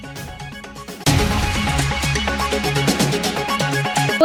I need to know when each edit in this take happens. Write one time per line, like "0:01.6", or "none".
none